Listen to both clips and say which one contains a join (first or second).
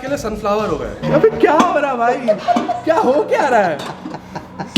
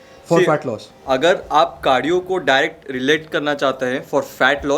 first